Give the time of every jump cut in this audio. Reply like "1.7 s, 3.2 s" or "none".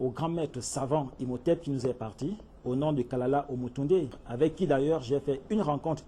4.2 s